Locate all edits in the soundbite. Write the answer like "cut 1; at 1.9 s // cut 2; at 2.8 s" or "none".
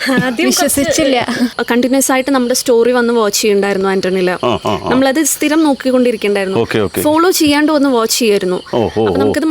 cut 1; at 1.5 s

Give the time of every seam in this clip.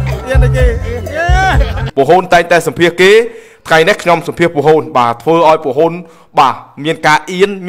cut 1; at 1.8 s

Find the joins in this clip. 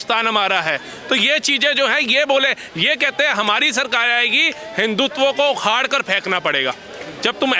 none

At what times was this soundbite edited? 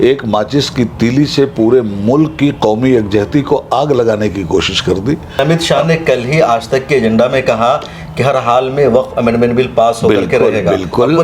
cut 1; at 5.4 s

